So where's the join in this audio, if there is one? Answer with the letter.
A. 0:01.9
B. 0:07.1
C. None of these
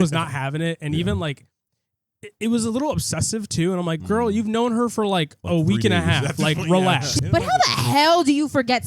B